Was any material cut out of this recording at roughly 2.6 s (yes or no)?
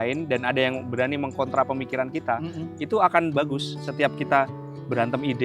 no